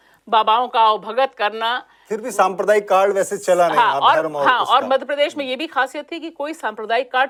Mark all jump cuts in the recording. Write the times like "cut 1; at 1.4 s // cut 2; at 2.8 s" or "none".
none